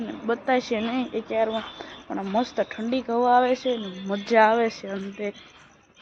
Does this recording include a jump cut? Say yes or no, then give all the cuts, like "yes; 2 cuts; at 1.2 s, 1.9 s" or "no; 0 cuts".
no; 0 cuts